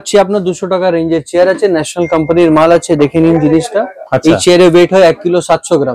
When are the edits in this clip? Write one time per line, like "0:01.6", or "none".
none